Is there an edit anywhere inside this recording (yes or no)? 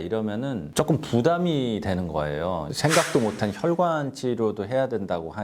no